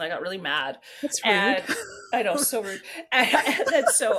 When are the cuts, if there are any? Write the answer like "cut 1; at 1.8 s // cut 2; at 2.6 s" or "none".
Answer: none